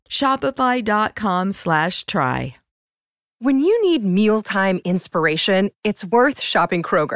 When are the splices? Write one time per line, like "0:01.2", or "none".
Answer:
0:02.6